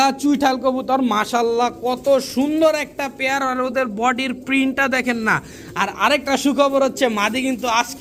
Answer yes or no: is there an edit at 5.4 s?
no